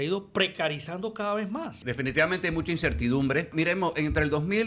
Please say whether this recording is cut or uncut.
cut